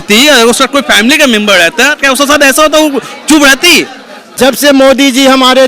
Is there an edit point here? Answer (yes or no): yes